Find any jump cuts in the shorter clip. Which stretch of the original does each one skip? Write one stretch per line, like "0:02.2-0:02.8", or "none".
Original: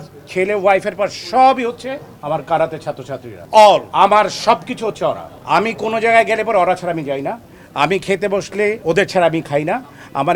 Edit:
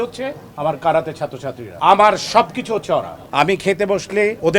0:03.4-0:03.9
0:05.3-0:07.6